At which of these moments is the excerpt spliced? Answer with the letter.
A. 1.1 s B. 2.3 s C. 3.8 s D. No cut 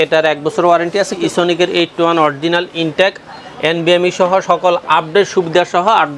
A